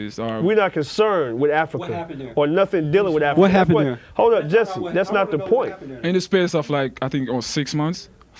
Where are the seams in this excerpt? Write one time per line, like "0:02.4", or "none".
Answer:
none